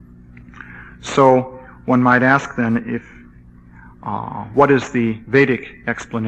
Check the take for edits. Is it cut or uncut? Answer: uncut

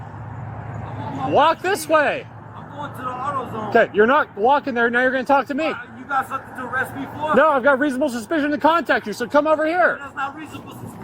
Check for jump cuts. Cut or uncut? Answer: uncut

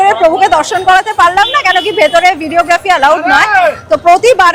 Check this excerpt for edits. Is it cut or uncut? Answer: uncut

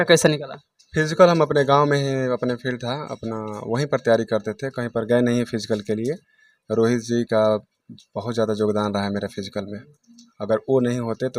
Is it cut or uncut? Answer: uncut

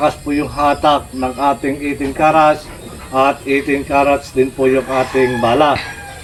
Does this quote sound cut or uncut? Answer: uncut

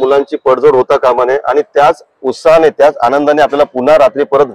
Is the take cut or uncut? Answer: uncut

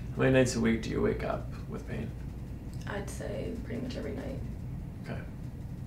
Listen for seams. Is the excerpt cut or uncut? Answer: uncut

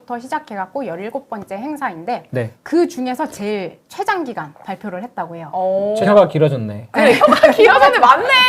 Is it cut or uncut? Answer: cut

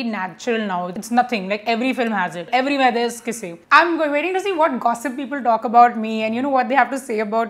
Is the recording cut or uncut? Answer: cut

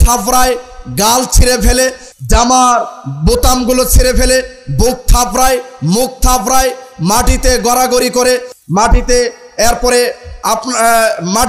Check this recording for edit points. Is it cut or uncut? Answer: uncut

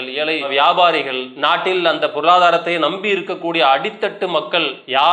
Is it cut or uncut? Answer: uncut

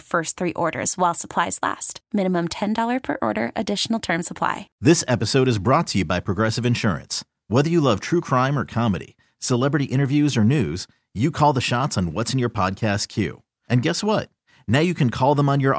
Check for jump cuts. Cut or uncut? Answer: cut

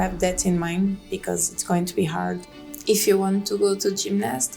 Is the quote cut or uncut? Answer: cut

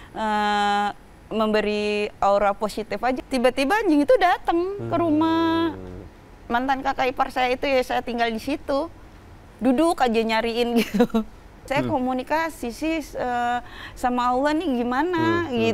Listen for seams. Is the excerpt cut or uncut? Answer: cut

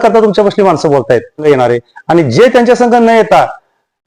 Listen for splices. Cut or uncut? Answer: cut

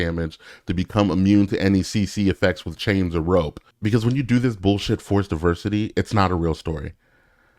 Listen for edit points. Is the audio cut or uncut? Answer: cut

